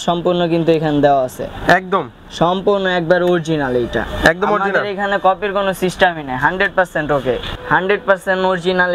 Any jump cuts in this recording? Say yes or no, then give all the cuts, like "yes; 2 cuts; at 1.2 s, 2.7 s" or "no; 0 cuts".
yes; 1 cut; at 7.5 s